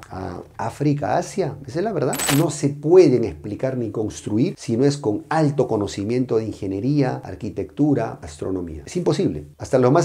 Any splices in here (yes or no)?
yes